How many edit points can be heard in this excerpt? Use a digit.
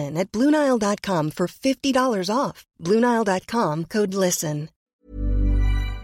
1